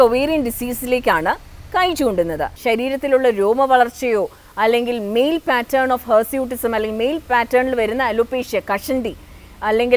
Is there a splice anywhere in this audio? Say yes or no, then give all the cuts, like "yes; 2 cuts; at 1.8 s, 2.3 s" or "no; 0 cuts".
yes; 1 cut; at 2.5 s